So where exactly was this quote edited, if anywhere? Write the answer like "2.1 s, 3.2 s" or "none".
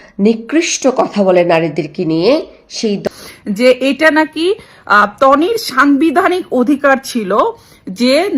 3.0 s